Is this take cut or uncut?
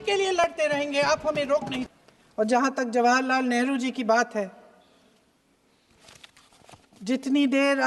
cut